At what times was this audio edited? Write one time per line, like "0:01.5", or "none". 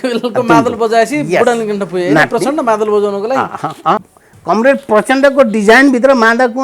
0:04.1